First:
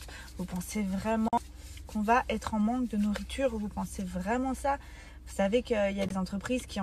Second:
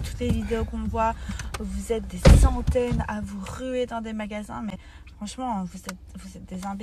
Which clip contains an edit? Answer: first; 1 cut; at 1.4 s

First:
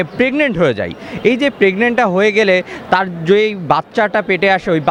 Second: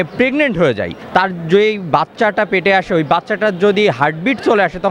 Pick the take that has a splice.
second; 1 cut; at 1.0 s

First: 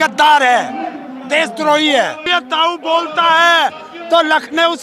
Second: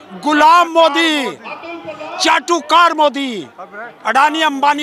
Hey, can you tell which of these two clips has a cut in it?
first; 1 cut; at 2.2 s

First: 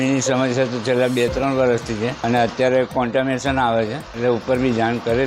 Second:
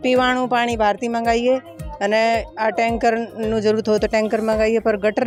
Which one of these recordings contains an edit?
first; 2 cuts; at 2.2 s, 4.0 s

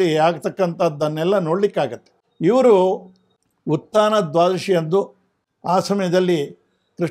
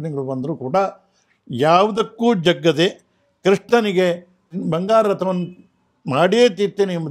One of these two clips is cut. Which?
second; 1 cut; at 4.5 s

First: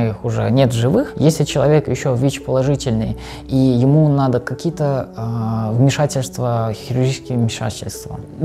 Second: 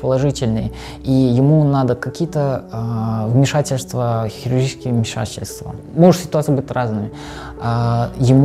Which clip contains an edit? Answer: first; 1 cut; at 1.1 s

